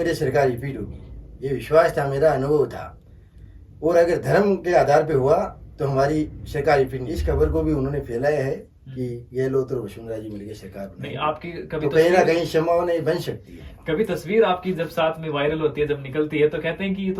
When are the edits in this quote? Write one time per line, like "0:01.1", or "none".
0:07.1